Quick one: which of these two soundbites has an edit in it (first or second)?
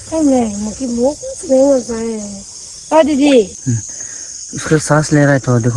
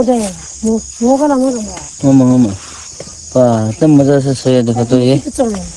first